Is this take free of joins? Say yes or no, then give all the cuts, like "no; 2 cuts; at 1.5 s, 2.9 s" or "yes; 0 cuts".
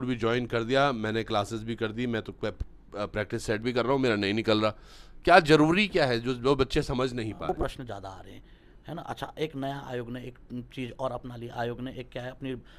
no; 1 cut; at 7.5 s